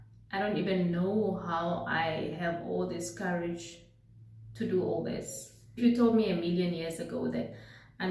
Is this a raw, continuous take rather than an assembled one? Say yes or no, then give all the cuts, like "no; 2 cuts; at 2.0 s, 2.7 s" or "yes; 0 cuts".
no; 1 cut; at 5.8 s